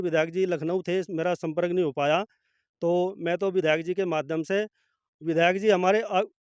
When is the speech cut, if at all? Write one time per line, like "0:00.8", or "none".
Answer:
none